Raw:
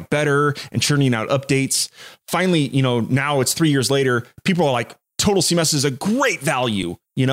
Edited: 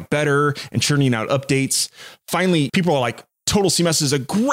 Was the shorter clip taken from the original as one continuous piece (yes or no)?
no